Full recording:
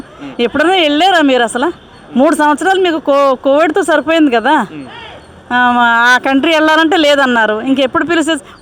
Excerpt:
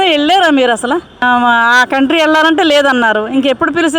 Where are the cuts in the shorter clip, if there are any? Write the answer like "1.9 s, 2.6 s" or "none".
1.1 s